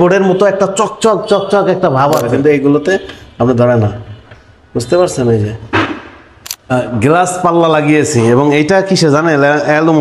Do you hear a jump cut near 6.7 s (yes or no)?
yes